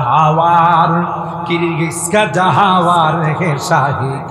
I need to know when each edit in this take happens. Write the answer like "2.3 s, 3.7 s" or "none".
none